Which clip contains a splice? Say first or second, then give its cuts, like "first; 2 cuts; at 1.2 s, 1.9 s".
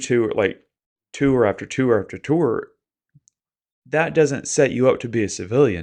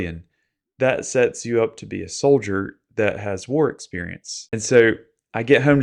second; 1 cut; at 4.5 s